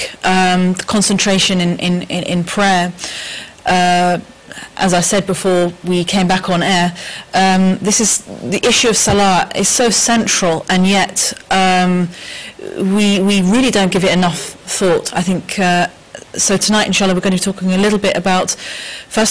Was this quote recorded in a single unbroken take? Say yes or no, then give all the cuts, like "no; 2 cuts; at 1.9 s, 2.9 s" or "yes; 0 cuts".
no; 1 cut; at 12.6 s